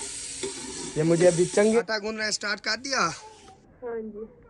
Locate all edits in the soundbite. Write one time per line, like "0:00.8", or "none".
0:01.8